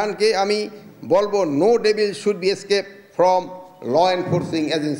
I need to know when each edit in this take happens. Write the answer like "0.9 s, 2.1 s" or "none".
none